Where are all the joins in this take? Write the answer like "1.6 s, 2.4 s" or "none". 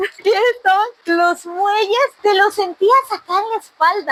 none